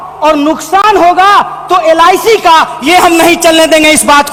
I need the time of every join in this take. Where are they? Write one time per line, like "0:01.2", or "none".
none